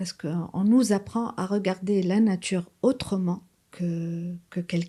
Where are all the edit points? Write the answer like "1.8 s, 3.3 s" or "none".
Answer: none